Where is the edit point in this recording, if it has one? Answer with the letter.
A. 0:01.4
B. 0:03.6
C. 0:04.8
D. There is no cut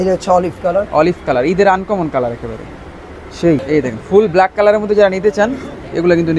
B